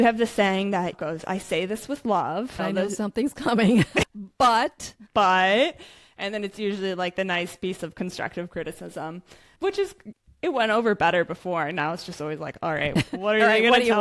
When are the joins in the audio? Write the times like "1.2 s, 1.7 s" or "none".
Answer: 4.5 s, 12.9 s